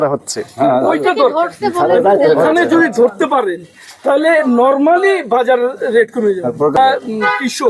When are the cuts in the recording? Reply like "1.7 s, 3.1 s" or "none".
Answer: 6.8 s